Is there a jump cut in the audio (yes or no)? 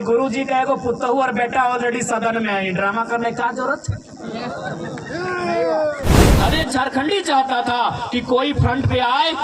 yes